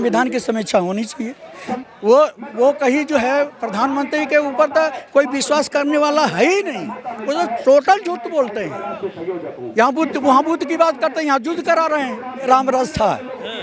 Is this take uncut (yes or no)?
no